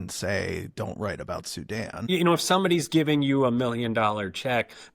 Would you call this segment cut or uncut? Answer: cut